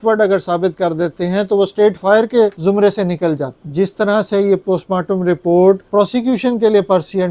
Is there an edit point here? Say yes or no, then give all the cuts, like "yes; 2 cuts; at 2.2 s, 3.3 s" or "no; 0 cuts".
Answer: yes; 3 cuts; at 2.6 s, 3.6 s, 5.8 s